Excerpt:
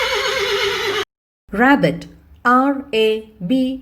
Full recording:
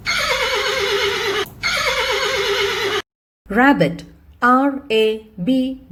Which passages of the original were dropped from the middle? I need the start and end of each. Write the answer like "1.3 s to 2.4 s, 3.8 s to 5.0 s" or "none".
1.5 s to 3.1 s